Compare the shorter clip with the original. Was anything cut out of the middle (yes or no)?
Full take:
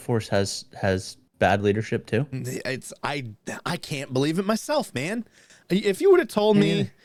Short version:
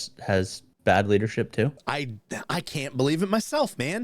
yes